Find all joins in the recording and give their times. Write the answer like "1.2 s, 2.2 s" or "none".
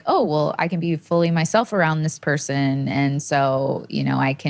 none